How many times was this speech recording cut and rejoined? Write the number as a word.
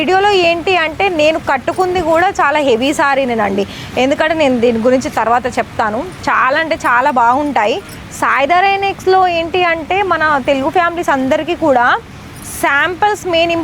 zero